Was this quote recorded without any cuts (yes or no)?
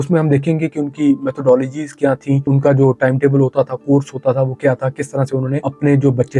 no